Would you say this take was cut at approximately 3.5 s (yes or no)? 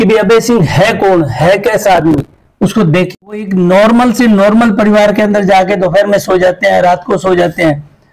yes